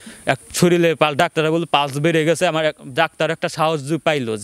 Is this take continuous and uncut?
yes; 0 cuts

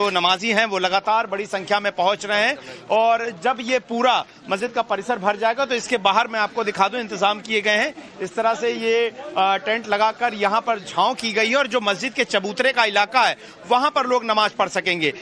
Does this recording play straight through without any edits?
yes; 0 cuts

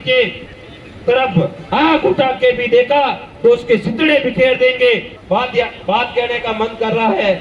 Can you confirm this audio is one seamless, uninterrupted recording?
no; 1 cut; at 5.1 s

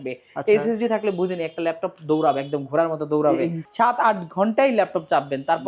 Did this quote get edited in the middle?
yes; 1 cut; at 3.6 s

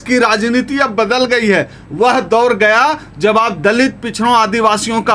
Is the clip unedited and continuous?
yes; 0 cuts

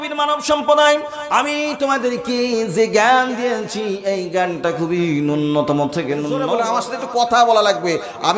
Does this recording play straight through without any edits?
no; 1 cut; at 6.4 s

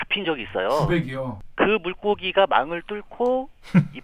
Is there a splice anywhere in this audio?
yes; 1 cut; at 1.4 s

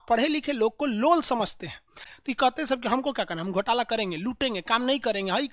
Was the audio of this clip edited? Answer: yes; 1 cut; at 2.0 s

